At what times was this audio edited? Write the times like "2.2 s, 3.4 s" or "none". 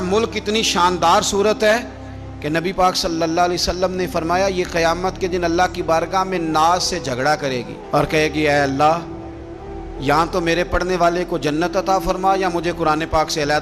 none